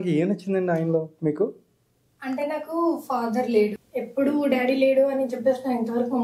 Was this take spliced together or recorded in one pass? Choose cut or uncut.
cut